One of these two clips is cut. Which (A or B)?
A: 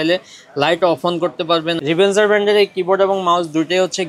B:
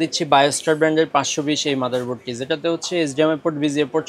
A